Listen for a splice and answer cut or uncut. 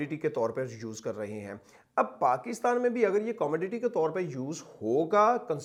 uncut